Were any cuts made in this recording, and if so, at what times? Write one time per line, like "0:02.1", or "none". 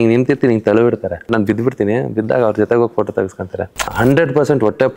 0:01.3
0:03.9